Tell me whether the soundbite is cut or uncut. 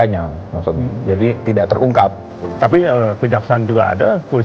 cut